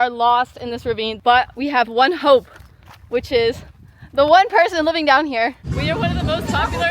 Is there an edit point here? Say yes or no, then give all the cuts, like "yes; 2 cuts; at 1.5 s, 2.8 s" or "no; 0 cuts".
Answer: yes; 2 cuts; at 1.2 s, 5.7 s